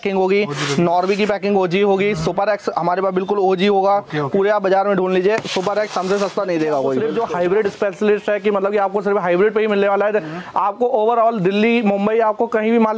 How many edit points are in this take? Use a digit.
1